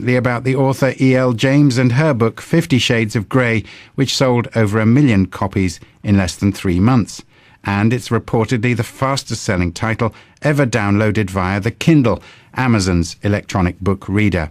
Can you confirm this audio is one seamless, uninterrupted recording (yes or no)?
no